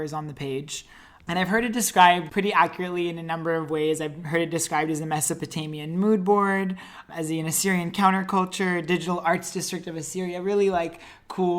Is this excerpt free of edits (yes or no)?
no